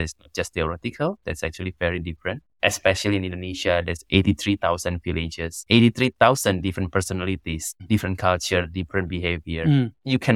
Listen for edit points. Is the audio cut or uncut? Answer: uncut